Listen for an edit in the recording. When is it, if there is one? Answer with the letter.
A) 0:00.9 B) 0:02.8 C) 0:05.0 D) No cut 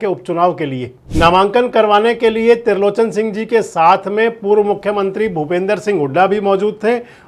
A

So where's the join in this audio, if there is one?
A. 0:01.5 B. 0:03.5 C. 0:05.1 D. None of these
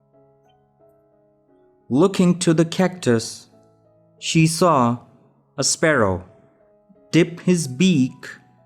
A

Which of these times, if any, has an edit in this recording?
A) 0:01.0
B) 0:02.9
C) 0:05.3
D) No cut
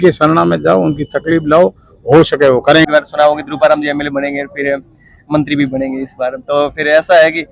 B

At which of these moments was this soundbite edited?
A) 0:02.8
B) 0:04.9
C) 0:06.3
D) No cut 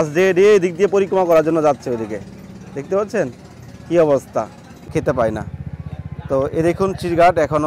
B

